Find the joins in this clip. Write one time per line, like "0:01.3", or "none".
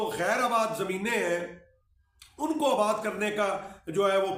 none